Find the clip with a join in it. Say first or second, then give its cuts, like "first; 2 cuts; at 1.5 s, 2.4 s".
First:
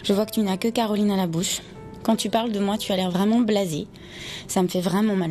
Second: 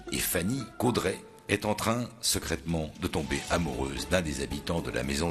second; 1 cut; at 1.3 s